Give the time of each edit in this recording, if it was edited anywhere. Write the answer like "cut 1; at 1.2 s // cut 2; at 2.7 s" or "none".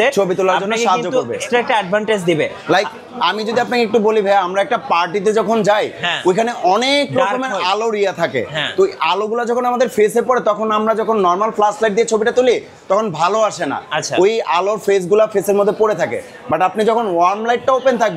none